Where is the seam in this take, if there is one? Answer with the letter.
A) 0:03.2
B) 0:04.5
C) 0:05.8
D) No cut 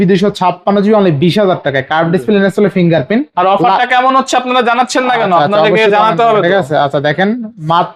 D